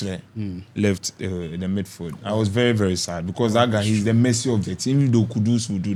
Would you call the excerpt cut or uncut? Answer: uncut